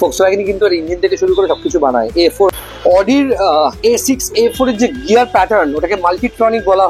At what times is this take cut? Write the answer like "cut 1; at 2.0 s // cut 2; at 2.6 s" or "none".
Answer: cut 1; at 2.5 s